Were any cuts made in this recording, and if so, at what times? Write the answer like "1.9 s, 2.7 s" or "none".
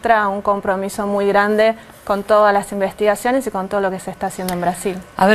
2.6 s